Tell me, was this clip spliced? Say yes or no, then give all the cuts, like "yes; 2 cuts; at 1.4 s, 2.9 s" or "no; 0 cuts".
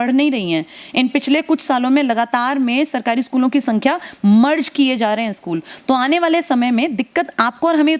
no; 0 cuts